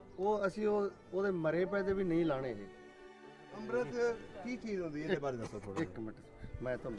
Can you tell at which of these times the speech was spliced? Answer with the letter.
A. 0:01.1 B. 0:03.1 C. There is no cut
B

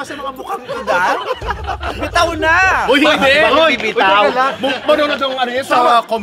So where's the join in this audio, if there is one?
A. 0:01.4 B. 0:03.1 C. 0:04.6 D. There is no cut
D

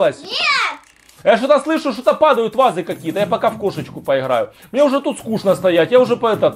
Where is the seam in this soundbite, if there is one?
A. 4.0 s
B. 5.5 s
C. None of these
C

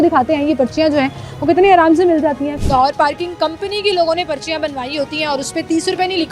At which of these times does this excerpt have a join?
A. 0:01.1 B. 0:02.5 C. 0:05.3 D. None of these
B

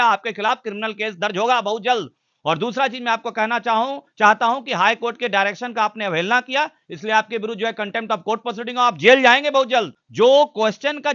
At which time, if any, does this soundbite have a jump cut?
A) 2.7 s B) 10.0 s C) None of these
B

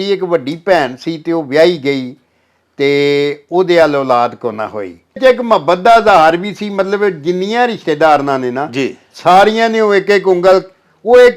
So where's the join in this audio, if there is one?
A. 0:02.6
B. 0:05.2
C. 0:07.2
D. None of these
B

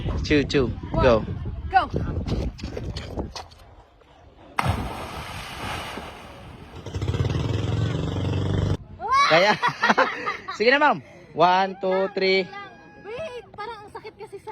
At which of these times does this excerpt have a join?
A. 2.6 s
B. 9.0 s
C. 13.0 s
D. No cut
B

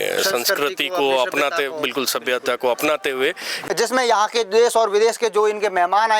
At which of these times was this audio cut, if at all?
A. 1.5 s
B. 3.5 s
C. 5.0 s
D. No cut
B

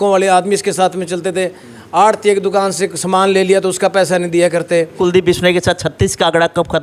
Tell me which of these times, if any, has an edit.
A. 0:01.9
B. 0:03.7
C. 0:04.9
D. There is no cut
C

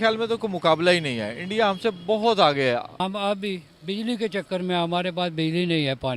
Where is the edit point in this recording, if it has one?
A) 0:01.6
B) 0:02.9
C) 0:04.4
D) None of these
B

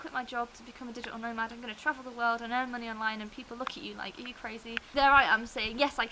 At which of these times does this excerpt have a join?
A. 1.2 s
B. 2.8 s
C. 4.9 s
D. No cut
C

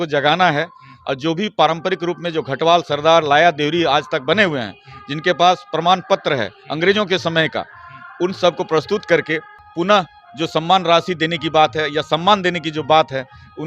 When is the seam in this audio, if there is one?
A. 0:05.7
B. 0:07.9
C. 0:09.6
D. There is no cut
C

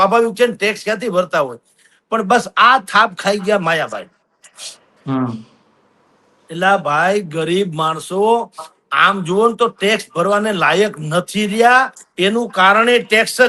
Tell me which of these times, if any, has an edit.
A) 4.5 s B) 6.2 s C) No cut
C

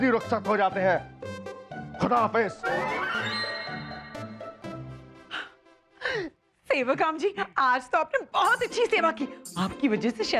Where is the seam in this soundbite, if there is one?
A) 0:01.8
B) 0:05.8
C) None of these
C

